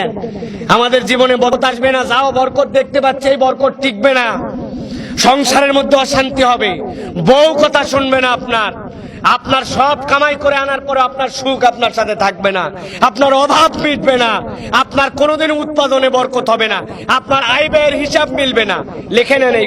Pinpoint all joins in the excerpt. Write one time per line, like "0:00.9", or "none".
0:01.5